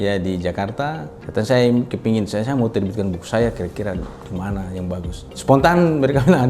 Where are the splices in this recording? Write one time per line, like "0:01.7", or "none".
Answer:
0:01.1
0:05.2